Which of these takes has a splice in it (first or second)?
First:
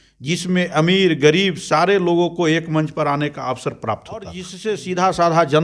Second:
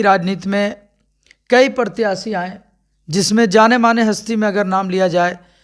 first